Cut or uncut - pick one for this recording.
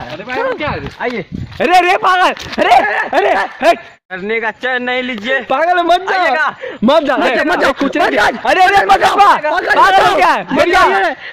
cut